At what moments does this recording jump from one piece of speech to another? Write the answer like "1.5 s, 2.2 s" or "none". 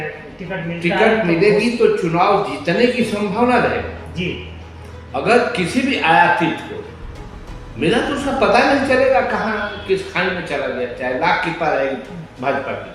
none